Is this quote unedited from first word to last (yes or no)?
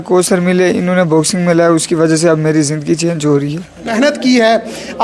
no